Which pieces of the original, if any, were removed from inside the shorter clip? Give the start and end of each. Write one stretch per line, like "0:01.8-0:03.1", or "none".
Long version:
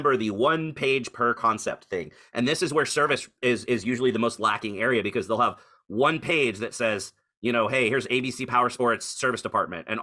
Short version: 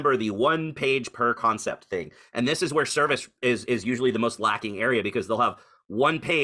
none